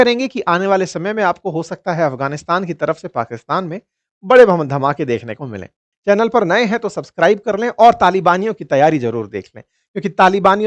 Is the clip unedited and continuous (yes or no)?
no